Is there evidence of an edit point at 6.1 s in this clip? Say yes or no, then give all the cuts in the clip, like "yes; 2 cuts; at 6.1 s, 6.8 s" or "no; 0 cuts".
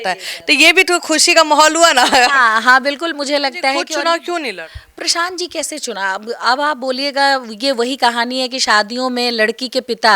no; 1 cut; at 3.9 s